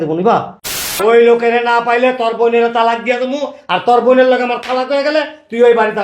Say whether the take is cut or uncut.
cut